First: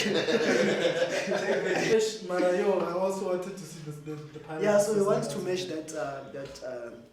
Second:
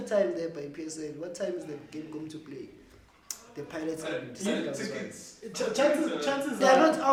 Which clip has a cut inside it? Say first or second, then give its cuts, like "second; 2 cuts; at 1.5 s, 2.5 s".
first; 1 cut; at 1.8 s